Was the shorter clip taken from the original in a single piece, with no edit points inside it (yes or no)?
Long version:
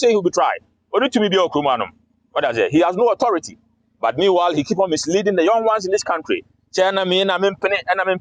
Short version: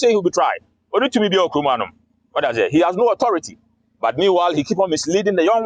yes